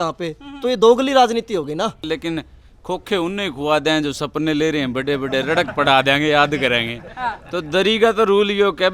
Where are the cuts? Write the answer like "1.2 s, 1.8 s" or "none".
2.0 s